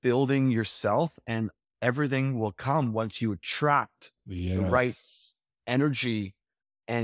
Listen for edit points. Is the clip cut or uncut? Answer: uncut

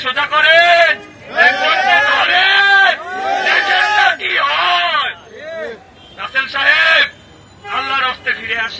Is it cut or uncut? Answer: uncut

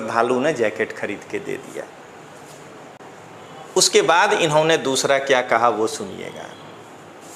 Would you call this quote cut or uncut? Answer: uncut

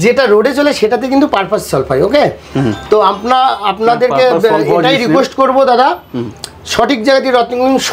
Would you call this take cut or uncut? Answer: uncut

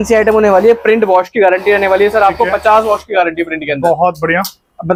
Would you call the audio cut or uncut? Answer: uncut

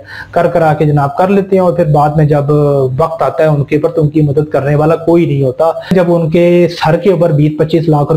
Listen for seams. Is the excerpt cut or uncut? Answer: cut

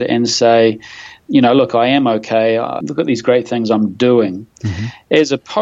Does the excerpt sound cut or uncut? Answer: cut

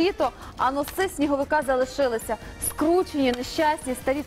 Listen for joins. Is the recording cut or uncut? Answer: uncut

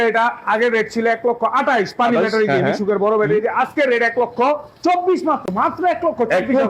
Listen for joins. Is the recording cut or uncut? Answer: uncut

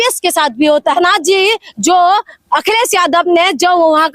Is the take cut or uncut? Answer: cut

